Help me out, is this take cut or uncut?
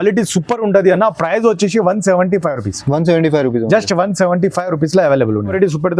uncut